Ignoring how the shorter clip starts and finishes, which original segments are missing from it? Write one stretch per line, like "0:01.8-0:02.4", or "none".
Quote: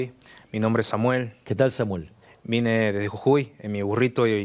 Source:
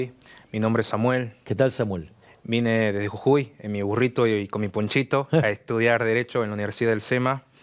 none